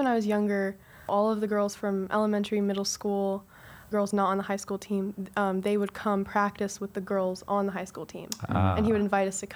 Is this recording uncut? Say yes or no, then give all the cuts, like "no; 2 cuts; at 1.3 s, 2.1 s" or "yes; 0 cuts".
no; 2 cuts; at 1.1 s, 3.9 s